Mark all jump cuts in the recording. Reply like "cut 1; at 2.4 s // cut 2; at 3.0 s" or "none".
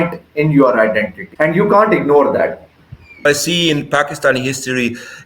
cut 1; at 1.2 s // cut 2; at 3.3 s